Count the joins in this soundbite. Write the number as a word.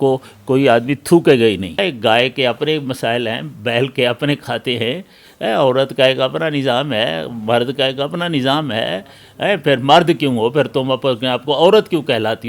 one